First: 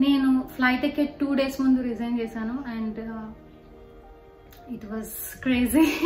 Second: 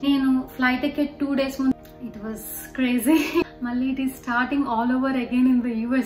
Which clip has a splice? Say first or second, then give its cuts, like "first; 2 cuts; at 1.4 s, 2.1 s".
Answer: second; 2 cuts; at 1.7 s, 3.4 s